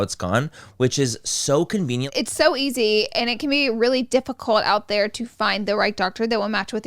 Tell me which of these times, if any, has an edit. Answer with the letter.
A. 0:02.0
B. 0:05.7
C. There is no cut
A